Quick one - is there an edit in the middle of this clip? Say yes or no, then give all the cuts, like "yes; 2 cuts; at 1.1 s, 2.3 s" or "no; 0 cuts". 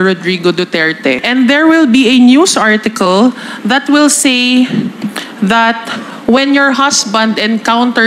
yes; 1 cut; at 1.2 s